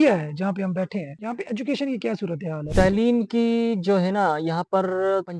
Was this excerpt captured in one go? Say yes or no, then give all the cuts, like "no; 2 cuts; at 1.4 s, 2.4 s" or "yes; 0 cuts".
no; 1 cut; at 2.6 s